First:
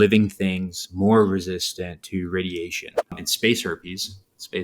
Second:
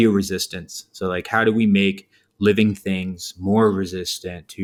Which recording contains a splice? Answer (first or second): first